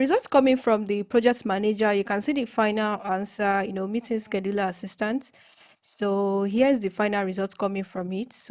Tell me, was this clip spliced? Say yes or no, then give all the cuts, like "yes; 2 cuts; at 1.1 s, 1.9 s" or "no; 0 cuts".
no; 0 cuts